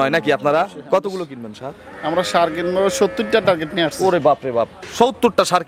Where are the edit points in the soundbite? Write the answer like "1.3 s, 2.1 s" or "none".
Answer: none